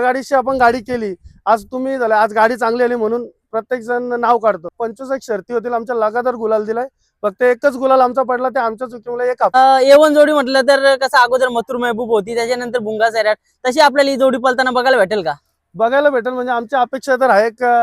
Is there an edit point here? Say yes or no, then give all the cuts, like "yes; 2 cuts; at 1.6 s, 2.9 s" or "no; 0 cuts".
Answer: yes; 2 cuts; at 4.8 s, 9.5 s